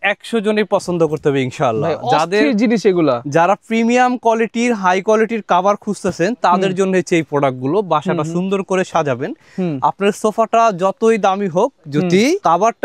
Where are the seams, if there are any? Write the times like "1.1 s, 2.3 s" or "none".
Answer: none